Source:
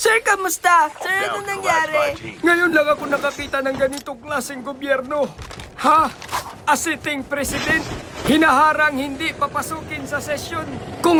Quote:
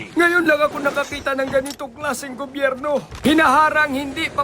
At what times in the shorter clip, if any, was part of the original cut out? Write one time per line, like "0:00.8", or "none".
0:03.1